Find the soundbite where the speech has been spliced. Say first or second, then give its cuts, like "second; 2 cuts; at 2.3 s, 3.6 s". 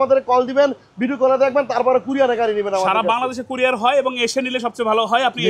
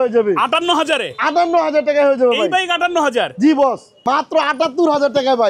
second; 1 cut; at 4.0 s